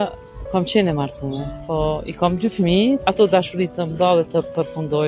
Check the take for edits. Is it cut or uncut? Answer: cut